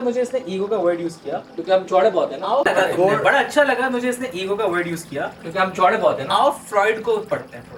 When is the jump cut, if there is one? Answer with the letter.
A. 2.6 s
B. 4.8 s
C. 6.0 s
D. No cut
D